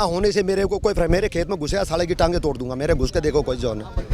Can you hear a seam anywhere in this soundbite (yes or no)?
no